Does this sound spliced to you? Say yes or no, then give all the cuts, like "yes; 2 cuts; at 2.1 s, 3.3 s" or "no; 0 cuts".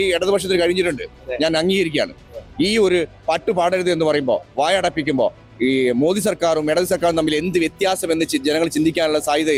no; 0 cuts